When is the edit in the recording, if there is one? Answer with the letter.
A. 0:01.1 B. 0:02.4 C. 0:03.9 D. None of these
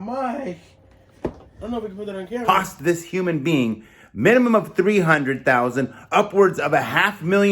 B